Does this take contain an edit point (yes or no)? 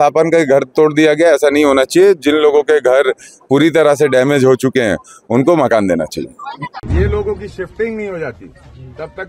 no